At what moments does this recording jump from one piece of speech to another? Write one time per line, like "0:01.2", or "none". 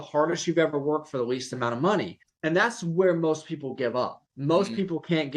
0:02.2
0:04.3